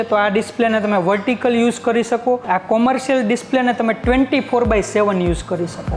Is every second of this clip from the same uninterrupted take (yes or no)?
no